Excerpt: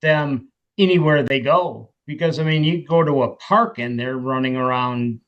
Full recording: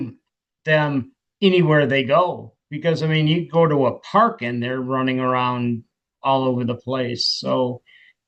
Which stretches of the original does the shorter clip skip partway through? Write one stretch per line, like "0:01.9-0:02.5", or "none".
none

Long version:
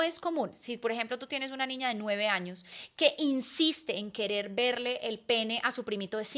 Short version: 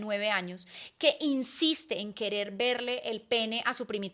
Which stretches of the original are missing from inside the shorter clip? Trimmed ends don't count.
none

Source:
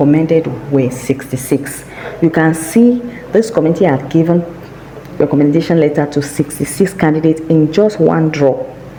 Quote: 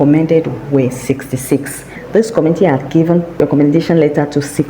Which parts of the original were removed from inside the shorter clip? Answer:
0:01.9-0:03.1
0:04.5-0:05.1

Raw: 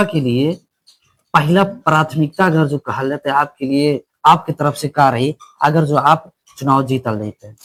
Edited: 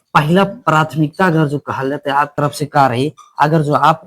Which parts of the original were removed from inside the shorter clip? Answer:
0:03.5-0:04.6

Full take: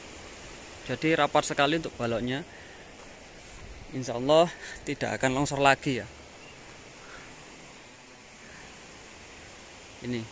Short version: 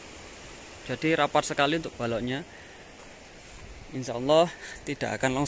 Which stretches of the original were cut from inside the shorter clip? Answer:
none

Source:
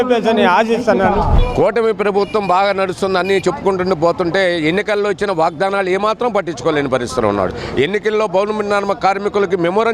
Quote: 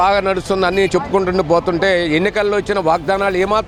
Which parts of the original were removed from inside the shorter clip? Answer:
none

